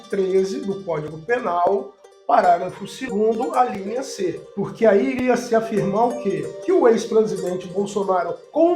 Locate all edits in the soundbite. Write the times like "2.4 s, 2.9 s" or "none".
3.0 s, 6.5 s